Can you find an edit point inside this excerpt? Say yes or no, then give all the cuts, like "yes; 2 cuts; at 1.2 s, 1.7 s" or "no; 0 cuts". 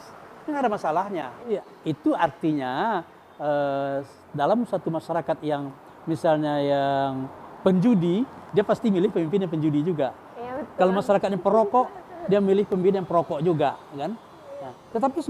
yes; 1 cut; at 1.5 s